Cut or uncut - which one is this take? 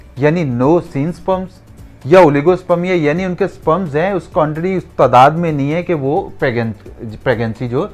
uncut